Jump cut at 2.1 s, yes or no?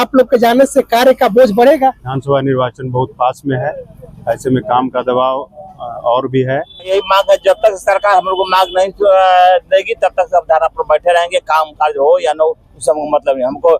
yes